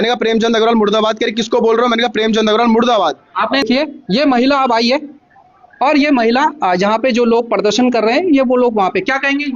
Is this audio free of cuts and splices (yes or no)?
no